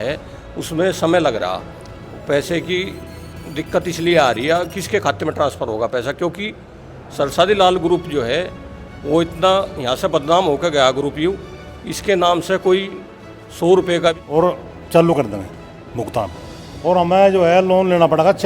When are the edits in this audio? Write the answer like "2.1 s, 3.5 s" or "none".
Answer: 14.2 s